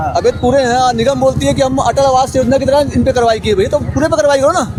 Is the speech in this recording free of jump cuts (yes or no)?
yes